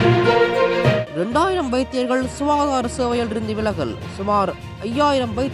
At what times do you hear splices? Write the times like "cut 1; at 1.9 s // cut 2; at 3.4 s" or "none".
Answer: cut 1; at 1.0 s